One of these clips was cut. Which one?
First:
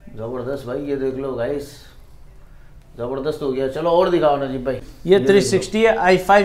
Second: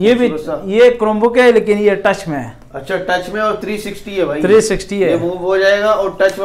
first; 1 cut; at 4.9 s

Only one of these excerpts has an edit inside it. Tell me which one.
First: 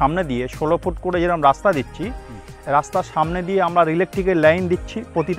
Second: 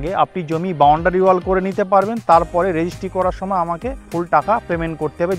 second; 1 cut; at 4.0 s

